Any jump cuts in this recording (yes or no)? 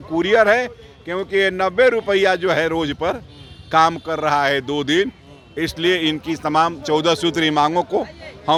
no